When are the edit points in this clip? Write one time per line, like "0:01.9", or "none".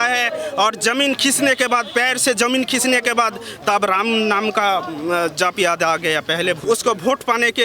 0:06.6